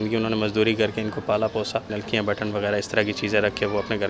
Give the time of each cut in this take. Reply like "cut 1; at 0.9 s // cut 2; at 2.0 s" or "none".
cut 1; at 2.0 s